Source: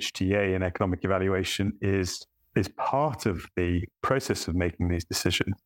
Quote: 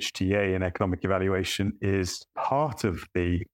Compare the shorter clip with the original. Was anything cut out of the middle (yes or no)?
yes